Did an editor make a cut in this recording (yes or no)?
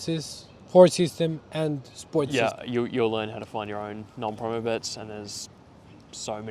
yes